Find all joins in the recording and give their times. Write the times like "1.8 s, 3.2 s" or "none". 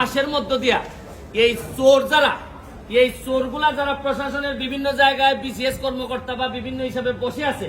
none

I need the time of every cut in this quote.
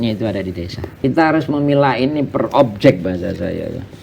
1.0 s

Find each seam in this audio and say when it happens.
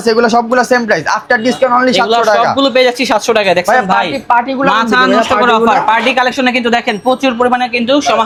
none

